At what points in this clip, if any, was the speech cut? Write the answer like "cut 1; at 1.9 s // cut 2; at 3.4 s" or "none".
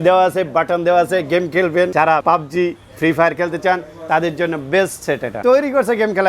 cut 1; at 2.1 s // cut 2; at 5.4 s

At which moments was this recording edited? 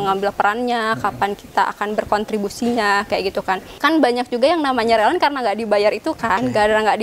cut 1; at 3.8 s

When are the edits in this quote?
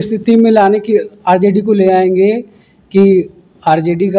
none

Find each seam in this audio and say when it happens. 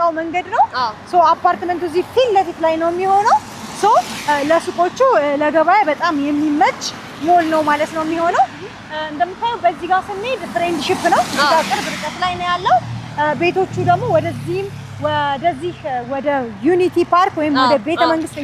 none

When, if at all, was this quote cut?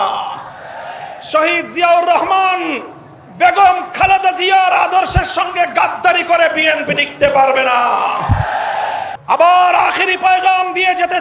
cut 1; at 9.1 s

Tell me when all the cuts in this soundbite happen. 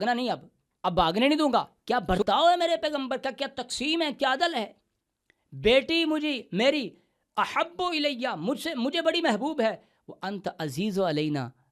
cut 1; at 1.8 s

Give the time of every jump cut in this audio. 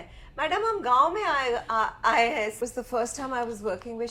cut 1; at 2.6 s

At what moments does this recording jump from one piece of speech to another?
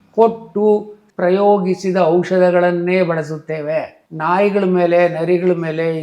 cut 1; at 1.0 s

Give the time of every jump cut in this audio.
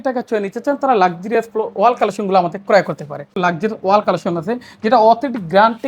cut 1; at 3.3 s

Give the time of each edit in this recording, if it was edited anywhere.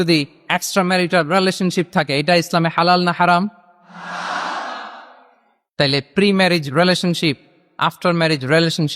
none

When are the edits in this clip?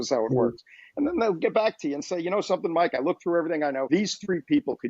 cut 1; at 3.8 s

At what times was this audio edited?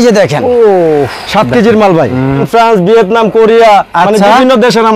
cut 1; at 2.4 s

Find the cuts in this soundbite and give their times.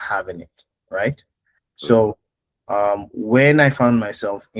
none

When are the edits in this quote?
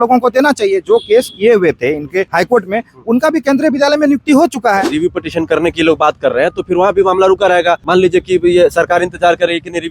cut 1; at 2.3 s // cut 2; at 4.9 s // cut 3; at 7.8 s

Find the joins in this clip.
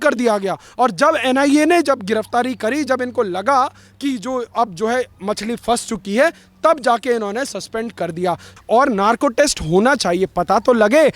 cut 1; at 8.5 s

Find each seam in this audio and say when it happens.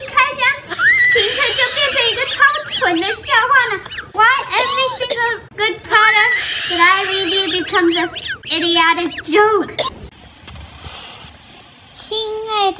cut 1; at 9.9 s

